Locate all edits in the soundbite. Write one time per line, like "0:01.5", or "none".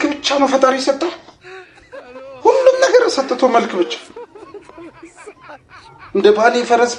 none